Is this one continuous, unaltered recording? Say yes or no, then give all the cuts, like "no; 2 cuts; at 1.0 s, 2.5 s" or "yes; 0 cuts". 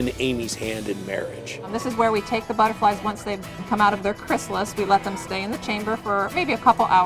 no; 2 cuts; at 1.8 s, 3.6 s